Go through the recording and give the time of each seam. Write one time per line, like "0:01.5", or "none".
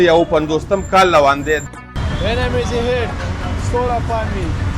0:01.7